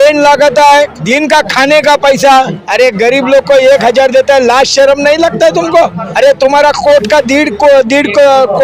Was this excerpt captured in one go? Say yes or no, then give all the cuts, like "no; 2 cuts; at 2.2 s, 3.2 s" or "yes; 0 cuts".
no; 3 cuts; at 1.0 s, 2.6 s, 6.0 s